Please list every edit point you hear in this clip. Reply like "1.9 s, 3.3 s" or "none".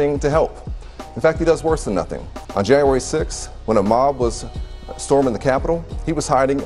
2.4 s